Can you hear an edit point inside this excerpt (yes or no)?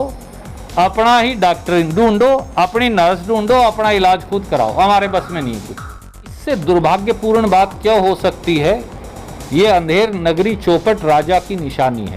yes